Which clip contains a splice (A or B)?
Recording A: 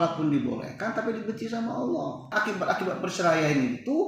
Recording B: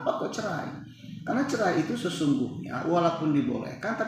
A